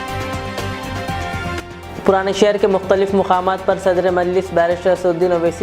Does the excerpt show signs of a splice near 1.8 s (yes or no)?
yes